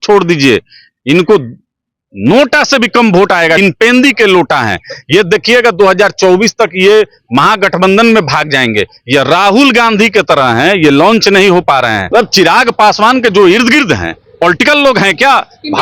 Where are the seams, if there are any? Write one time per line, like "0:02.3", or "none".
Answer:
0:03.6
0:12.0